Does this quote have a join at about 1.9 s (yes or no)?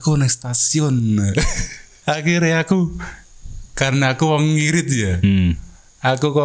yes